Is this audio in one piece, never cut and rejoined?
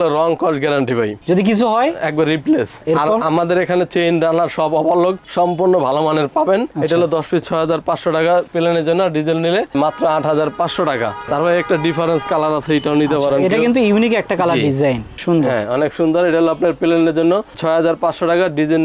yes; 0 cuts

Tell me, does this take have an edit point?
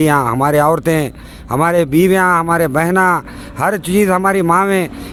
no; 0 cuts

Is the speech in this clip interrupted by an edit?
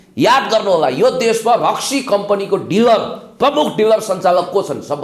no; 0 cuts

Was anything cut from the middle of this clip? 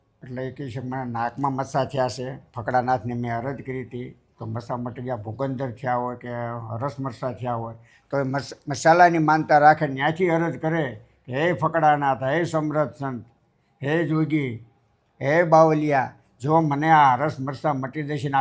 no; 0 cuts

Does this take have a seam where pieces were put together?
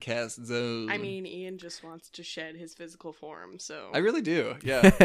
no; 0 cuts

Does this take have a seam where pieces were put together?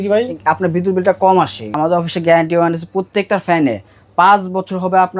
yes; 1 cut; at 1.6 s

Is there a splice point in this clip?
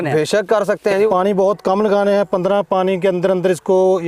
yes; 1 cut; at 1.1 s

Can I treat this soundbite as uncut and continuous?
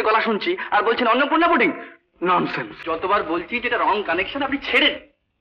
no; 1 cut; at 2.7 s

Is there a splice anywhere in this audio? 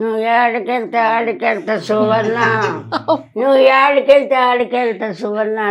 no; 0 cuts

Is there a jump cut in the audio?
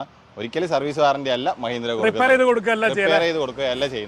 no; 0 cuts

